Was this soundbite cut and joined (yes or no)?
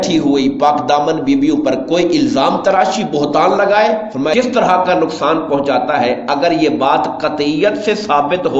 yes